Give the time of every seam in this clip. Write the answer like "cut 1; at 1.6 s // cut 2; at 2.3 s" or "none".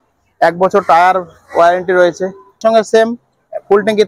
cut 1; at 2.6 s